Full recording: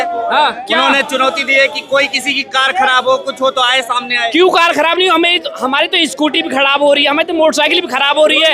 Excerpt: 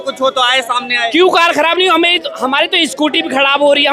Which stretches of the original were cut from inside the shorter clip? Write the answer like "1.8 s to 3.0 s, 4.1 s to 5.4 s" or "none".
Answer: none